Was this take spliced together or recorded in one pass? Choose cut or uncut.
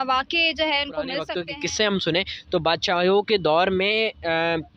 cut